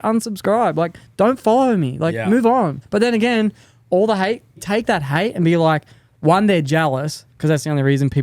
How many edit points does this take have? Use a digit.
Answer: 3